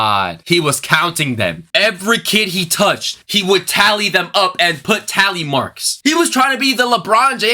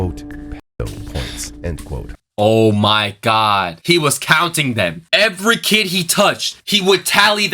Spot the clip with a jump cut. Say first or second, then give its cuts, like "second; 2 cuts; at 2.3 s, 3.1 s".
second; 1 cut; at 2.2 s